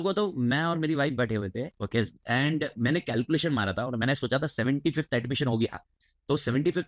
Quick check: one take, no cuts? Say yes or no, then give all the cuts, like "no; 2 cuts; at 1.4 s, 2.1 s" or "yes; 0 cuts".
yes; 0 cuts